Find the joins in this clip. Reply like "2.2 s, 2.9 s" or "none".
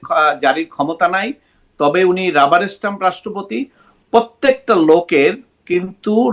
3.9 s